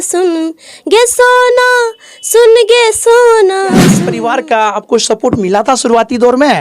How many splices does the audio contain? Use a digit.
1